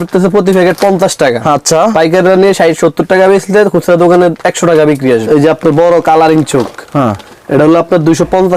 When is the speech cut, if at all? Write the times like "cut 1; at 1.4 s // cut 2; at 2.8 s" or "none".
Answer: cut 1; at 5.3 s